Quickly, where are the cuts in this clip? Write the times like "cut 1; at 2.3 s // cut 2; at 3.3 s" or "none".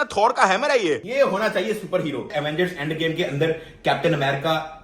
cut 1; at 1.1 s // cut 2; at 2.3 s